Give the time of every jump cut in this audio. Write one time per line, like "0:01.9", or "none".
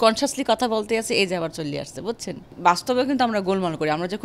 0:02.5